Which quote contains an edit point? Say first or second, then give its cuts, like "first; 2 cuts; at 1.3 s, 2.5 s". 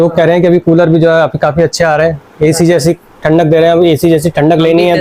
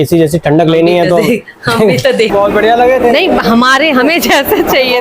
second; 1 cut; at 2.3 s